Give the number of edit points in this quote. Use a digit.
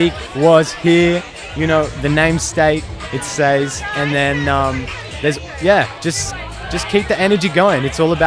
0